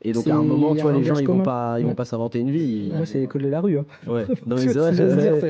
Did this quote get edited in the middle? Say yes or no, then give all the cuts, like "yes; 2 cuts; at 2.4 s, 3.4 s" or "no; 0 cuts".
yes; 1 cut; at 2.9 s